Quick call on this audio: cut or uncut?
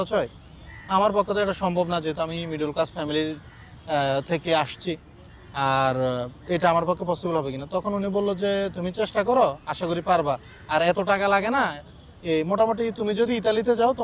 uncut